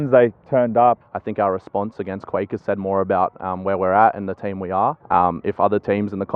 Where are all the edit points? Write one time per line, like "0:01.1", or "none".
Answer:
0:01.0
0:05.0